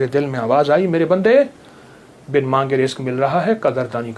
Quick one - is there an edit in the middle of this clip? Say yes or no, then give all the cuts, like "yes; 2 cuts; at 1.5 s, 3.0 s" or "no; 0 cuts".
no; 0 cuts